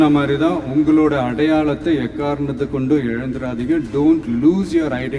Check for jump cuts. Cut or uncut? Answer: uncut